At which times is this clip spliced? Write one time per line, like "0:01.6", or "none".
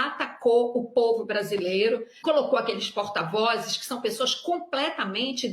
0:02.1